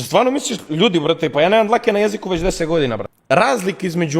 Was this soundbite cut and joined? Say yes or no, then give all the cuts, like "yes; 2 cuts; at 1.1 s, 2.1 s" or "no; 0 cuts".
yes; 1 cut; at 3.1 s